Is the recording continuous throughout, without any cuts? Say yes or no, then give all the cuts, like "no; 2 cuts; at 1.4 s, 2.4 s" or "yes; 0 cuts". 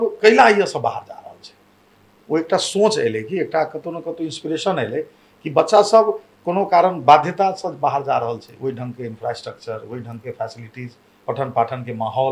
yes; 0 cuts